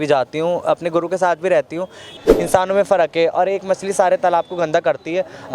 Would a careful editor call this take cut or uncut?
cut